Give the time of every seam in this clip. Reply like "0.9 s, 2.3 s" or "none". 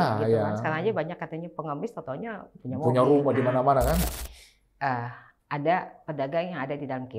4.1 s

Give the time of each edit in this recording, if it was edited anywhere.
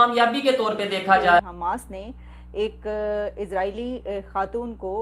1.5 s

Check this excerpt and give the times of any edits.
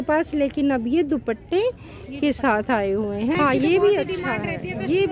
3.4 s

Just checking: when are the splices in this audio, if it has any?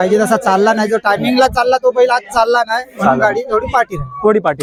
none

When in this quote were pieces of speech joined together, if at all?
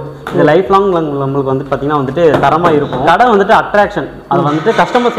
3.0 s

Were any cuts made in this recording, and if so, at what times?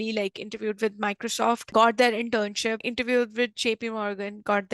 2.8 s

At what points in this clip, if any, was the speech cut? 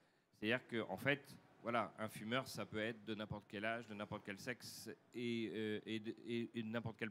3.1 s

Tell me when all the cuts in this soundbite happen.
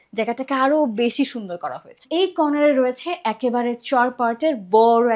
2.0 s

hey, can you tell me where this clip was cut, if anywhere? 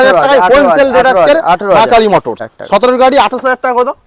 2.3 s

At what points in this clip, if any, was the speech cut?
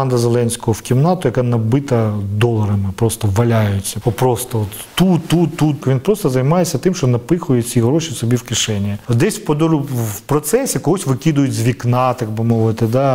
3.9 s, 5.8 s, 9.0 s

